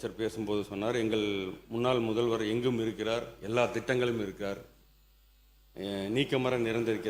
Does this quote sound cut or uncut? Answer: uncut